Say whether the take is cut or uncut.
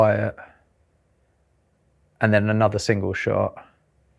uncut